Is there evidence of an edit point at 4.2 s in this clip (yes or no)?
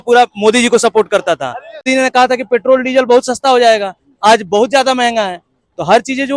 no